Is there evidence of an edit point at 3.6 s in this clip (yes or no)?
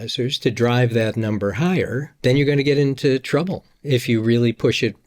no